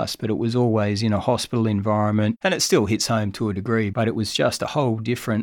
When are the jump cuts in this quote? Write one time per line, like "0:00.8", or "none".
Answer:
0:02.4